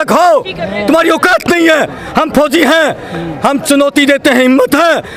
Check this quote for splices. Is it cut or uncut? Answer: uncut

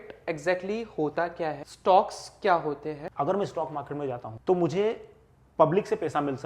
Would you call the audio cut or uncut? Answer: cut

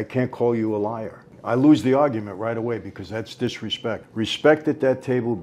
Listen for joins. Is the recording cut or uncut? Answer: cut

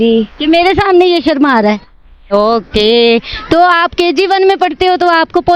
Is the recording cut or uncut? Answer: cut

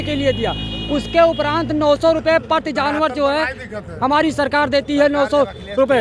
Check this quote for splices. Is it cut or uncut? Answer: uncut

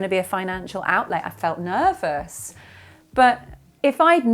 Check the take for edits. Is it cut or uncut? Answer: uncut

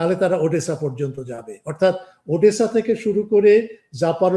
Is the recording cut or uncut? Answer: uncut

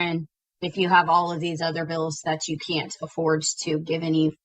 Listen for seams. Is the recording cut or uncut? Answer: uncut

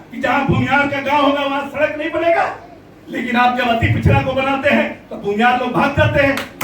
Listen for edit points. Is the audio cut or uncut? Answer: uncut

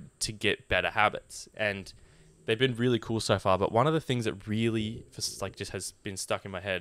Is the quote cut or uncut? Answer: uncut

